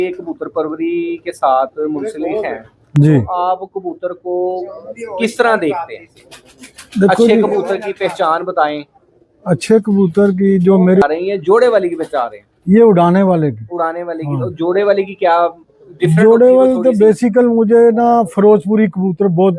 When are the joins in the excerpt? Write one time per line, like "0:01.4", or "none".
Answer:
0:11.0